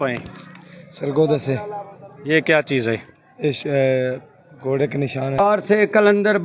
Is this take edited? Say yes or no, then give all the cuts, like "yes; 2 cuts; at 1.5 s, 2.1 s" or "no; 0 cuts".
yes; 1 cut; at 5.4 s